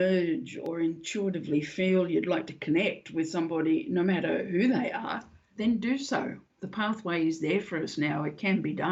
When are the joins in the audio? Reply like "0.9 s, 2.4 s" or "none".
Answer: none